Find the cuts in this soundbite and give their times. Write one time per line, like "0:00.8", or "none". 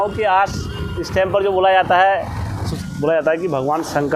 0:02.6